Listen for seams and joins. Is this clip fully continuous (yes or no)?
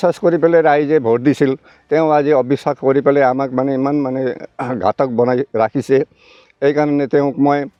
yes